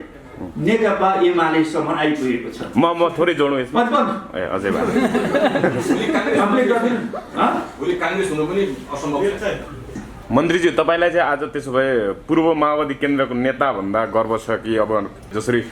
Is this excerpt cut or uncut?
cut